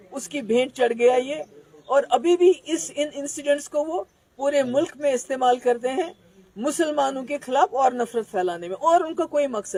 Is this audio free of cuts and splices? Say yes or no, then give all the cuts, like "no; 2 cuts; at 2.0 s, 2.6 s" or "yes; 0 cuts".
yes; 0 cuts